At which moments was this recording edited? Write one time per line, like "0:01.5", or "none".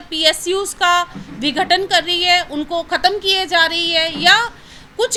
none